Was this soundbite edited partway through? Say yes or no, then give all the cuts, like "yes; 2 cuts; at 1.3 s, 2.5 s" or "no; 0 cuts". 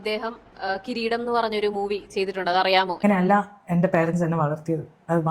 yes; 1 cut; at 3.0 s